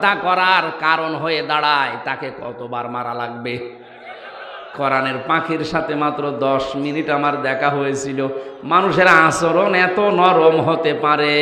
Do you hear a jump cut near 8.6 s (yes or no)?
no